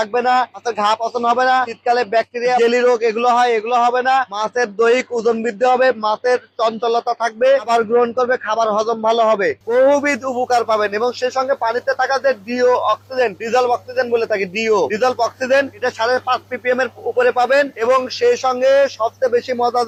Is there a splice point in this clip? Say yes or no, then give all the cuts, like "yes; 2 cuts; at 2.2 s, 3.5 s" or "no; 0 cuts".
no; 0 cuts